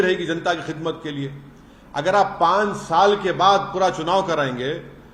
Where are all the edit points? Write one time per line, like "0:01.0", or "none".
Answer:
none